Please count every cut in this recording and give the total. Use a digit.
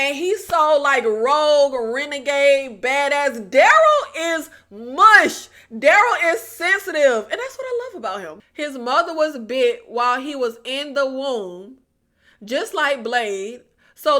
1